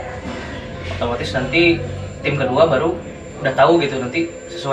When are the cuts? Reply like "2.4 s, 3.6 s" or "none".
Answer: none